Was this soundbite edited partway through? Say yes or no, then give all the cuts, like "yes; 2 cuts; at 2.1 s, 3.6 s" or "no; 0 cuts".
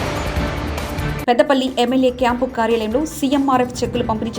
yes; 1 cut; at 1.0 s